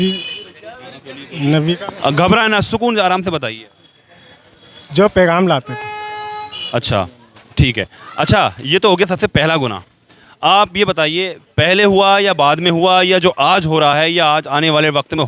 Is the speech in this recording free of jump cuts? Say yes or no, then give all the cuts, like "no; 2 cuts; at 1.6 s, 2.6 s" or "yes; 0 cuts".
no; 1 cut; at 6.6 s